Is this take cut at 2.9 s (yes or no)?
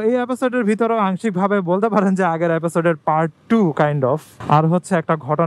no